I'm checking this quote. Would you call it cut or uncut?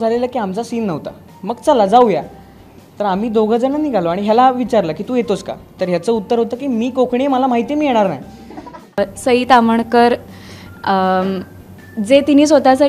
cut